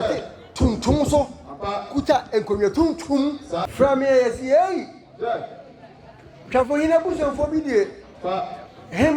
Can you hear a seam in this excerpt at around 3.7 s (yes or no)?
yes